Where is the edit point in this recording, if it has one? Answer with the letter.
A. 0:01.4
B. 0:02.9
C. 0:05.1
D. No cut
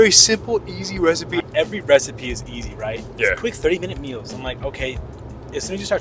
A